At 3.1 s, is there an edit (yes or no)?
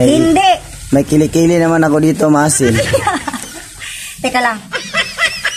no